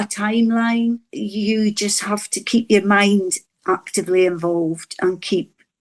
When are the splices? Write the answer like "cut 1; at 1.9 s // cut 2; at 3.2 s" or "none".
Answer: cut 1; at 1.1 s